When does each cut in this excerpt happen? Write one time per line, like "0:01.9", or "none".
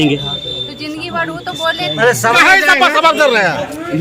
0:02.4